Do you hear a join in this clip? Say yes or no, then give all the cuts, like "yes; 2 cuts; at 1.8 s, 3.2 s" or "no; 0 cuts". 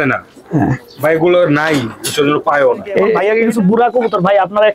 yes; 1 cut; at 3.2 s